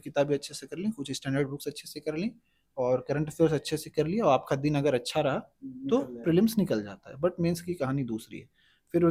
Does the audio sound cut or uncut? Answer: uncut